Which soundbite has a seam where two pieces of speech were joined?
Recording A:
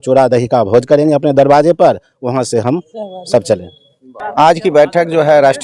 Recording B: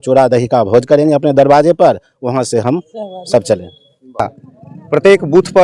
B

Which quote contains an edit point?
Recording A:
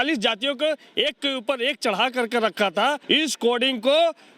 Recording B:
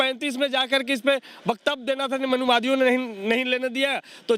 A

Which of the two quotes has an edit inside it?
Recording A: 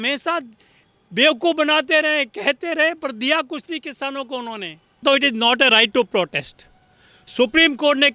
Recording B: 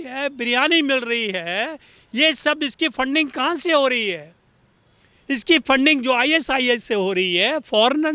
A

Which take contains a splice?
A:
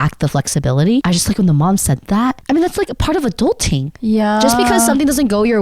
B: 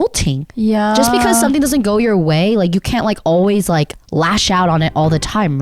A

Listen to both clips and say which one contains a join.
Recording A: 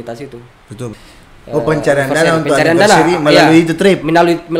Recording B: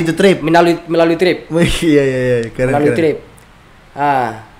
A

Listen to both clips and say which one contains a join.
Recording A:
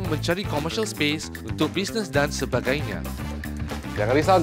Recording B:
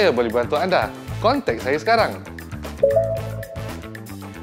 B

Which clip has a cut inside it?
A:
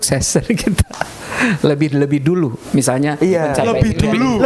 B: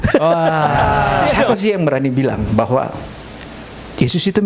B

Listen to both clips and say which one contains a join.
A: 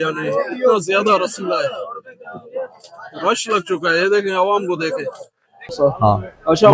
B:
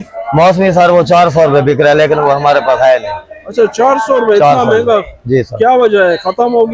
A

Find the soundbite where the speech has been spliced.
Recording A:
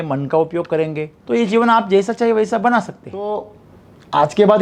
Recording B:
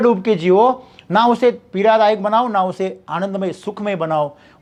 A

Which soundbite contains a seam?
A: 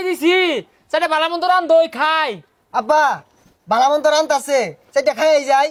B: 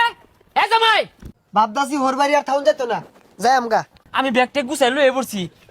B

